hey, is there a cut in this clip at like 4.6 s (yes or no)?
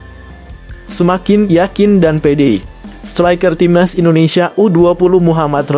no